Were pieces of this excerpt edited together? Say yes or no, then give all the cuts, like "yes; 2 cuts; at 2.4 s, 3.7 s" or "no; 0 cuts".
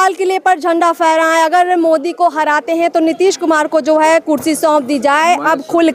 no; 0 cuts